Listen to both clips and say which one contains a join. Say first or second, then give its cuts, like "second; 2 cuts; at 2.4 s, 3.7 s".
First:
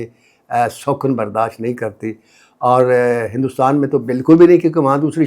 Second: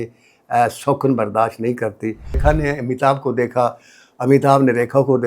second; 1 cut; at 2.4 s